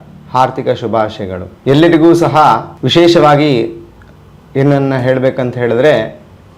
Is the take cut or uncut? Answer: cut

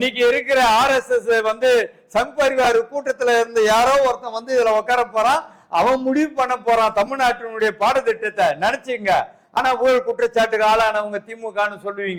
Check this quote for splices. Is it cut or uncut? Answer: cut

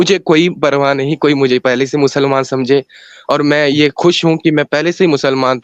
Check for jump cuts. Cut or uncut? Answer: uncut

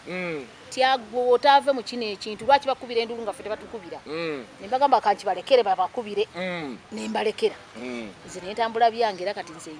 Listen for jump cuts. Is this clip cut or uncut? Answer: uncut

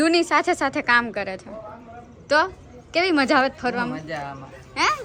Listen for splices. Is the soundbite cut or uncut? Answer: uncut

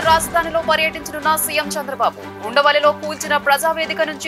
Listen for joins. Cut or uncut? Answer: uncut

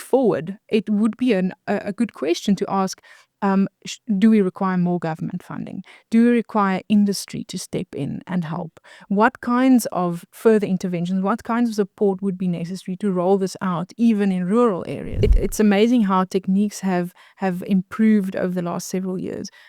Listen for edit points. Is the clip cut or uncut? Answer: cut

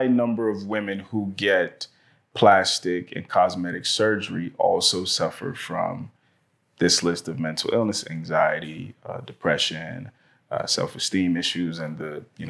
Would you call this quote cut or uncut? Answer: uncut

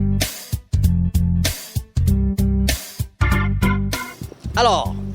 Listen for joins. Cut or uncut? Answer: cut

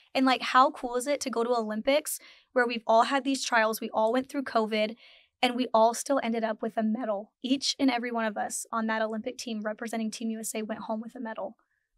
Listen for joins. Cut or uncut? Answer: uncut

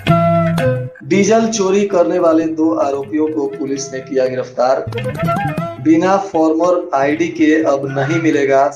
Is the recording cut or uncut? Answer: cut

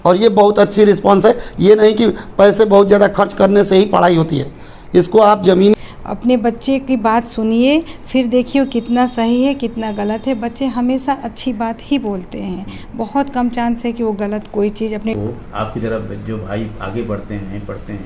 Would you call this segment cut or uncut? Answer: cut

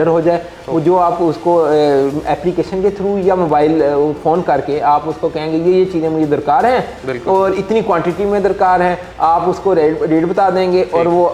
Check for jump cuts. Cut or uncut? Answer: uncut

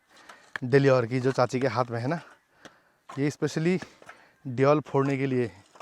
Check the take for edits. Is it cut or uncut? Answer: uncut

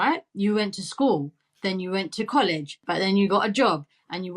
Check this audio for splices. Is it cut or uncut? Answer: cut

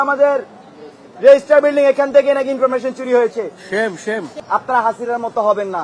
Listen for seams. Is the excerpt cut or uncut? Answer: cut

